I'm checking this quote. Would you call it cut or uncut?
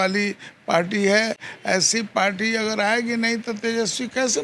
uncut